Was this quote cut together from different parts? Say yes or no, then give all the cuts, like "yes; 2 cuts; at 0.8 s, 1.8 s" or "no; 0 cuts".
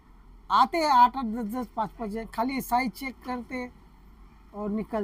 no; 0 cuts